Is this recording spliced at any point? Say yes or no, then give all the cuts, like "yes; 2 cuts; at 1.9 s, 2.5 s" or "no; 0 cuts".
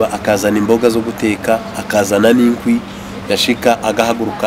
no; 0 cuts